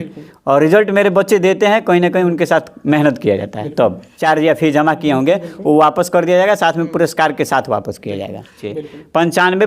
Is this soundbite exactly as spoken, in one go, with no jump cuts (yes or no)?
no